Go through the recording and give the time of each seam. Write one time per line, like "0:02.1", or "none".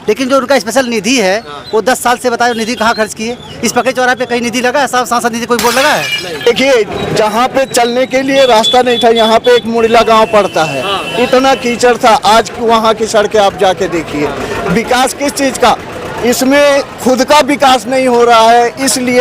0:06.5

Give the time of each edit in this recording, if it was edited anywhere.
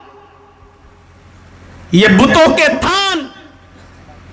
0:03.2

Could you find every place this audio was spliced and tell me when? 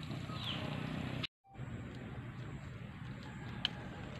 0:01.4

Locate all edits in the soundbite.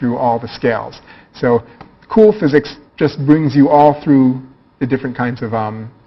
none

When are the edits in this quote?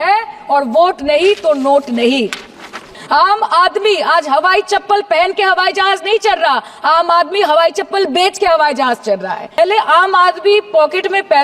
0:02.9
0:09.6

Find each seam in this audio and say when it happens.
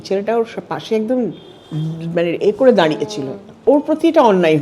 0:03.6

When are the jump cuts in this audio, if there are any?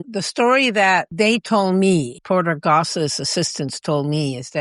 0:01.1
0:02.1

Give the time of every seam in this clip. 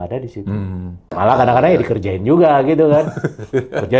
0:01.1

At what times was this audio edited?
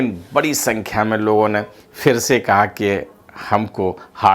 none

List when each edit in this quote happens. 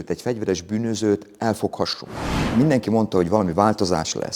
0:02.4

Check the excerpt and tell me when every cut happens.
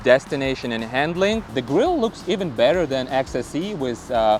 0:01.6

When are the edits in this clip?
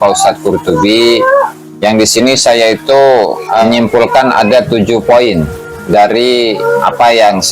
0:01.6
0:03.6
0:06.6

